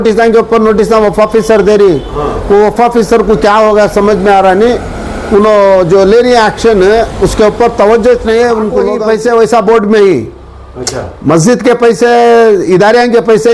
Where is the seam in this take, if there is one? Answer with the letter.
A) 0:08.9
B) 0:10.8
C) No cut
A